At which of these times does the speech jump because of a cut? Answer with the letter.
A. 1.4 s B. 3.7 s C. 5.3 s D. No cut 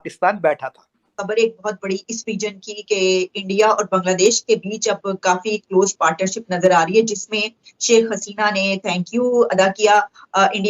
A